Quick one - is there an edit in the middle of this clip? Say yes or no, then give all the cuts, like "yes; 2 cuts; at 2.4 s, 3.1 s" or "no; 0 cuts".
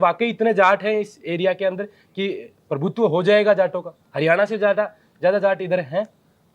no; 0 cuts